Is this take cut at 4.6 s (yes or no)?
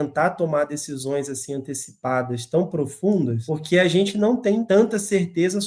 yes